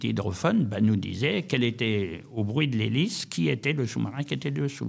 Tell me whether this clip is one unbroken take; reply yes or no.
yes